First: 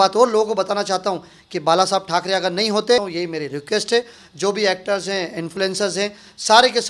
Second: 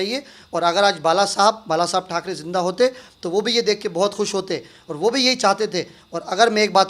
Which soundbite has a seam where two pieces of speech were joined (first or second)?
first